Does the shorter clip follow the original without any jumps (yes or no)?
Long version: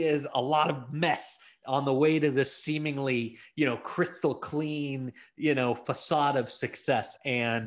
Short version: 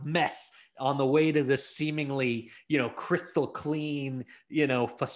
yes